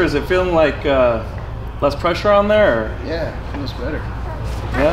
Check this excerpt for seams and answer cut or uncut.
uncut